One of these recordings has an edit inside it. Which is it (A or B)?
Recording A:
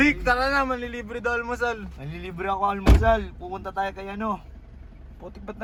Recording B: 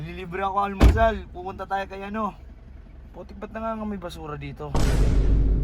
B